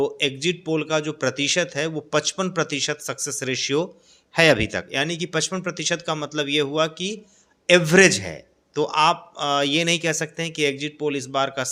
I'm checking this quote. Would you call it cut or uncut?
uncut